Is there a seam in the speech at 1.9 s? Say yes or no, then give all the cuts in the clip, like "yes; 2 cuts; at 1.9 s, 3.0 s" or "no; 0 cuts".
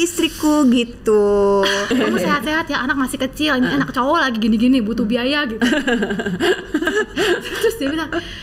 yes; 1 cut; at 1.9 s